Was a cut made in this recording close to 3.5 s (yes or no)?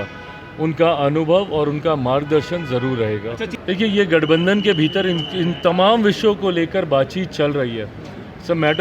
yes